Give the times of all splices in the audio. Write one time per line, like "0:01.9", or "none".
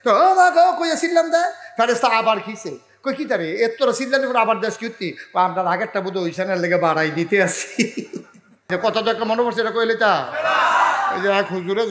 0:08.7